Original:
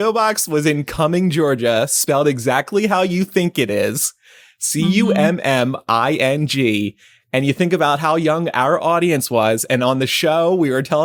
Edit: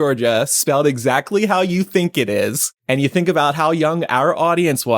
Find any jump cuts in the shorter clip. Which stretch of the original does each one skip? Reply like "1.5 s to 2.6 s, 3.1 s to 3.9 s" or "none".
4.1 s to 7.1 s